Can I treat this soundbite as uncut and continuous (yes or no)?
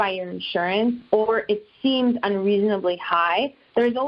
yes